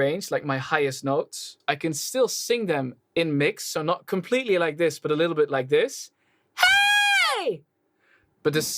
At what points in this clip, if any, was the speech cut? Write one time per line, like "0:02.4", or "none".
0:01.6